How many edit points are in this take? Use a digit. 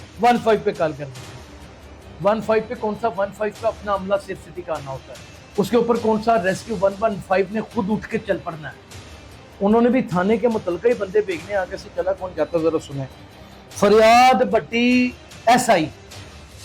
0